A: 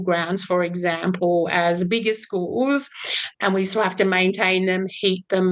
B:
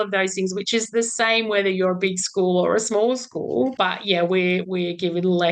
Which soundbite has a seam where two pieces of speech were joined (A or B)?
B